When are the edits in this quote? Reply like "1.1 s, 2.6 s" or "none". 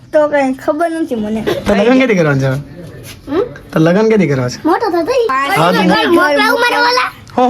1.5 s, 5.8 s